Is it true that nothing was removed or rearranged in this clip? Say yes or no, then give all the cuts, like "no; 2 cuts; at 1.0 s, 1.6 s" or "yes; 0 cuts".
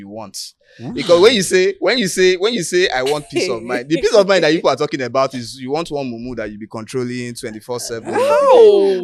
yes; 0 cuts